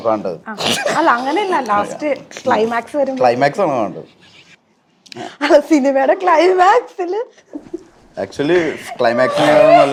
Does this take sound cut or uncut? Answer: uncut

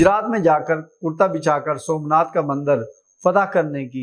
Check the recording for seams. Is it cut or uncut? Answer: uncut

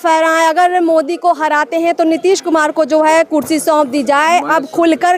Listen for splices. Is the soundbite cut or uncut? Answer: uncut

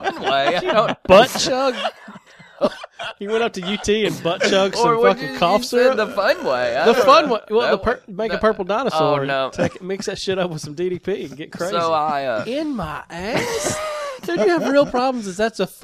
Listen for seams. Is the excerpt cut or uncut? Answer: uncut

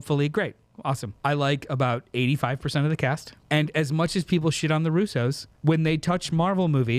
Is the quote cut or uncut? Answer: cut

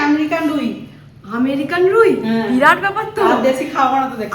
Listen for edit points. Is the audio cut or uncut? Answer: uncut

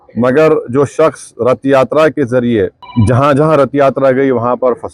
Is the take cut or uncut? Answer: cut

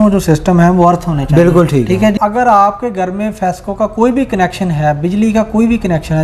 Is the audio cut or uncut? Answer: cut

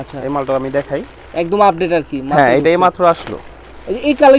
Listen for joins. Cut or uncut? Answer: uncut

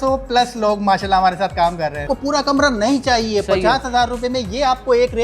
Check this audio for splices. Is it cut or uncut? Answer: cut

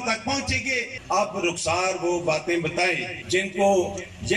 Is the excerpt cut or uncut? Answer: cut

